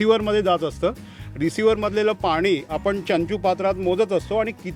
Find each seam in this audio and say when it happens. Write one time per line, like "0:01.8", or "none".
none